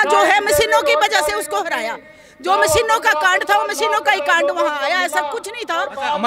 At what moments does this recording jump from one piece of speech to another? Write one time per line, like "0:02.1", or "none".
none